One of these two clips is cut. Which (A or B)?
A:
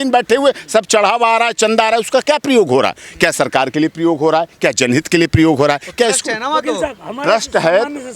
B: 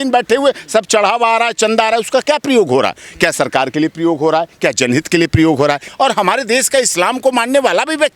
B